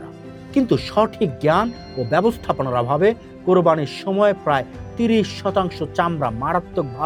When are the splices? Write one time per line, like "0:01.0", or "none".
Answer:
none